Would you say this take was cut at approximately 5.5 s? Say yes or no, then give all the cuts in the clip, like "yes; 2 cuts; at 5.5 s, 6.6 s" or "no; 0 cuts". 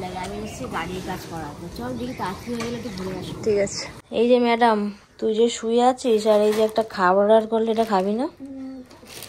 no; 1 cut; at 4.2 s